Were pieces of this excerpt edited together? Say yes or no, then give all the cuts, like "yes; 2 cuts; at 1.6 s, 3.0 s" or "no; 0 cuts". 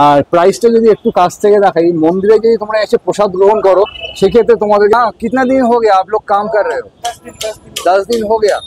yes; 1 cut; at 4.9 s